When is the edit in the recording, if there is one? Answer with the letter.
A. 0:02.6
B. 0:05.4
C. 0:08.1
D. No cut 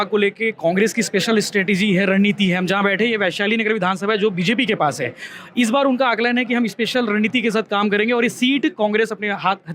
D